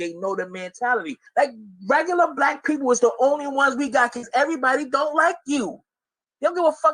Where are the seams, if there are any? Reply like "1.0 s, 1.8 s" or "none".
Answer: 0.9 s